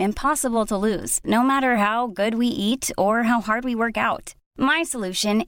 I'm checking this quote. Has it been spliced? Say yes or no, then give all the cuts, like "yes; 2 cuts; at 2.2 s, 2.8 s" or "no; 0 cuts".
no; 0 cuts